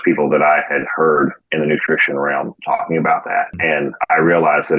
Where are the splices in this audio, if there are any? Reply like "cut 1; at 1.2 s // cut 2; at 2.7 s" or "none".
cut 1; at 2.6 s // cut 2; at 3.5 s